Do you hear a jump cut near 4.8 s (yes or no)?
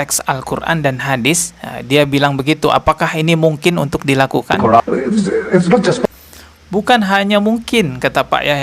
yes